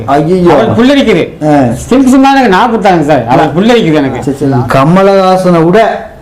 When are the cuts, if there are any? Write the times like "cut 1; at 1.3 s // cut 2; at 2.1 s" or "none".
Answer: cut 1; at 4.4 s

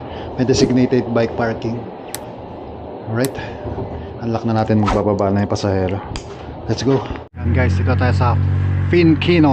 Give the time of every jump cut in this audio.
cut 1; at 7.4 s

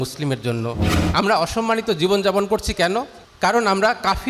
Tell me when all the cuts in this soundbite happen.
cut 1; at 0.9 s // cut 2; at 3.2 s

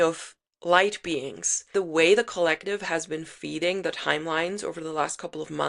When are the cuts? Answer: cut 1; at 1.7 s

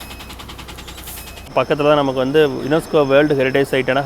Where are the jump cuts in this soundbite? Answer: cut 1; at 1.5 s

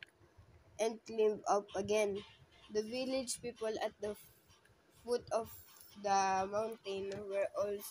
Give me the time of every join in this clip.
cut 1; at 2.6 s

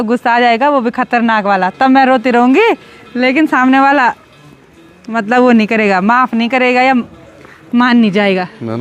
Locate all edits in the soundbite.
none

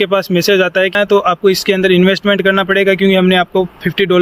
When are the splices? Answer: cut 1; at 0.9 s

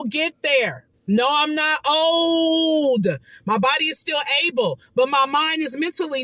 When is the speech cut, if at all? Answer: none

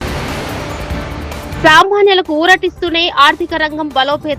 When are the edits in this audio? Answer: cut 1; at 1.6 s

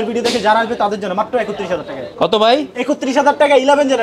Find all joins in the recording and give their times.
none

